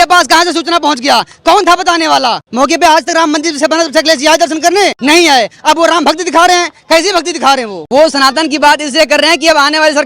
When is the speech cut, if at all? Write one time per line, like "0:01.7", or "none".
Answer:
0:02.4
0:05.0
0:07.8

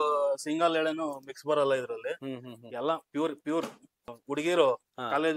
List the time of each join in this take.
0:04.1

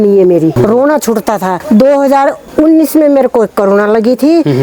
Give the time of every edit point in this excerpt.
0:01.5
0:02.4

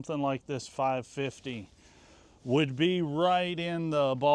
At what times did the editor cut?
none

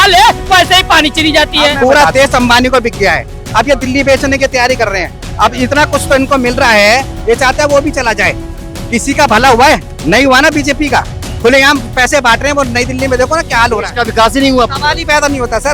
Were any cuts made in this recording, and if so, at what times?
0:01.8

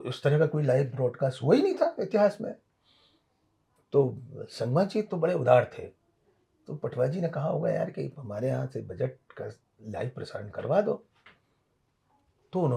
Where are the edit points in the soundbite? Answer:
none

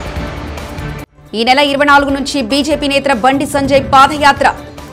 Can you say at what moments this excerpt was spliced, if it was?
0:01.1

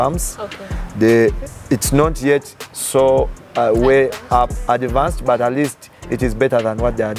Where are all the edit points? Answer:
none

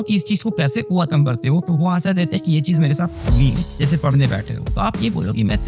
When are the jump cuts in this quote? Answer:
0:03.7

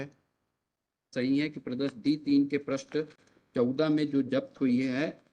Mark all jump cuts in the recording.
0:01.1

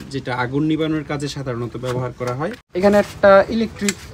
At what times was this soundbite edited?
0:02.6

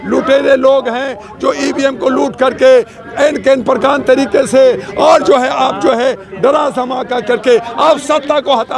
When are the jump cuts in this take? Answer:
none

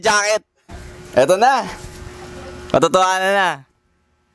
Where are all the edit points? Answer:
none

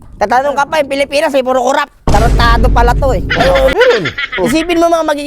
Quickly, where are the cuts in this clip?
0:03.7

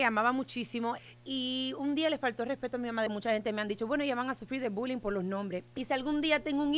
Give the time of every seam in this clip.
0:01.0
0:03.1
0:05.7

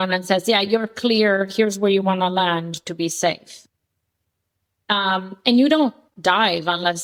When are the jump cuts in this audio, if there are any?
none

